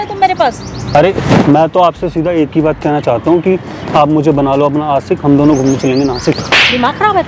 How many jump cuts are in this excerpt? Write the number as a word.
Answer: one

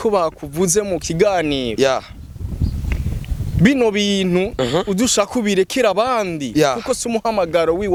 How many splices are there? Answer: zero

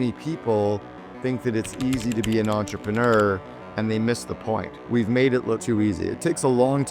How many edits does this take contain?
two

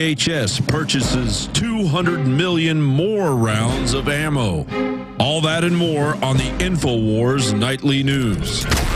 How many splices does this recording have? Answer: zero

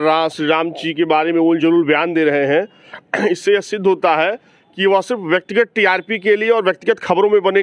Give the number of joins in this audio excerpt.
zero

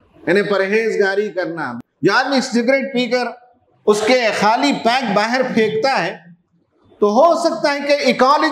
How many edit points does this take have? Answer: one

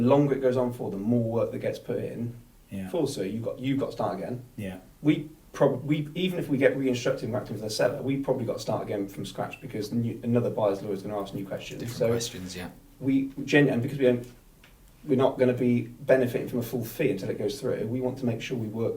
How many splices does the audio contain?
zero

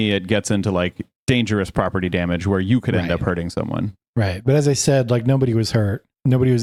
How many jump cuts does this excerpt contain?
zero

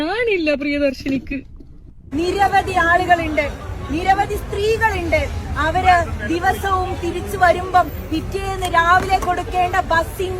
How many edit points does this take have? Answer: one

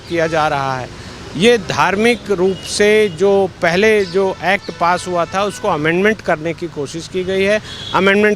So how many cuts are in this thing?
zero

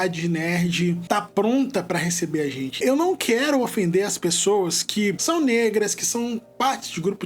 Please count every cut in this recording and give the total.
three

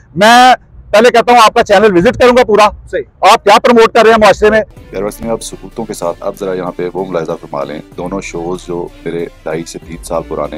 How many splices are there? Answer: one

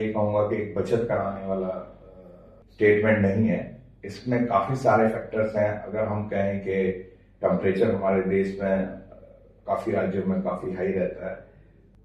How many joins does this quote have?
zero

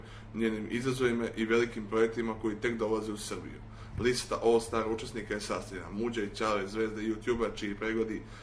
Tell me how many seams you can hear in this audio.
one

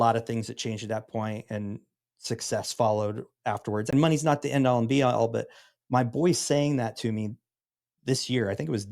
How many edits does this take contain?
one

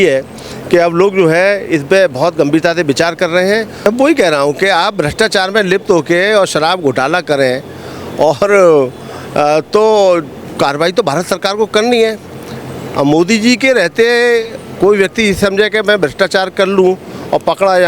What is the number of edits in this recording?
one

